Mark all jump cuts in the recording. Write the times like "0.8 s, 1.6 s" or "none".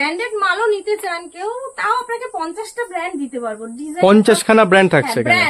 none